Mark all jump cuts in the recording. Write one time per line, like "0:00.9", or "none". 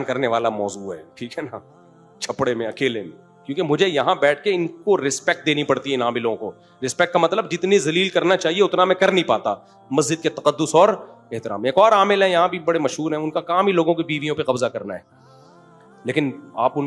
none